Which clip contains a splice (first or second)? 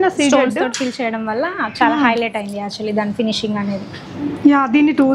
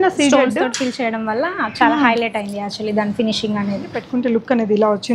second